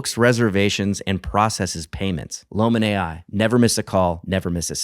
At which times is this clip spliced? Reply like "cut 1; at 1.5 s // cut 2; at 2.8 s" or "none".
cut 1; at 2.3 s